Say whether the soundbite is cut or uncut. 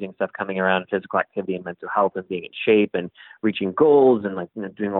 uncut